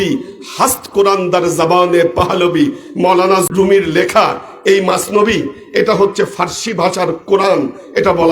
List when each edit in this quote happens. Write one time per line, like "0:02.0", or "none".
0:03.5